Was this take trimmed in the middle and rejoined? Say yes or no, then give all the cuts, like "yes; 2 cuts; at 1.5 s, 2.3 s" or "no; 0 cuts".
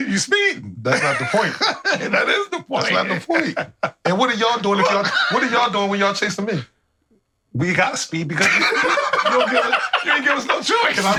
no; 0 cuts